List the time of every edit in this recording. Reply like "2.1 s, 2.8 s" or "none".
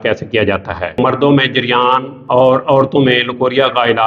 1.0 s, 2.1 s